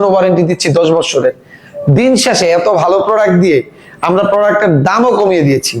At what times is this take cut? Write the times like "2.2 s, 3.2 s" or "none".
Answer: none